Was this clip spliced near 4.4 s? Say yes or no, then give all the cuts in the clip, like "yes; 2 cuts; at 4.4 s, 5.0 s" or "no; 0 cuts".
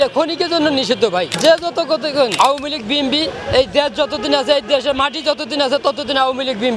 no; 2 cuts; at 1.3 s, 2.3 s